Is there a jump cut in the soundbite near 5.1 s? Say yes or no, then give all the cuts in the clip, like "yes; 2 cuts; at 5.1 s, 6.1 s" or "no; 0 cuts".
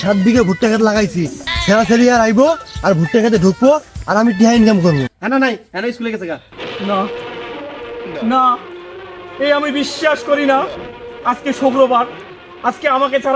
yes; 1 cut; at 5.1 s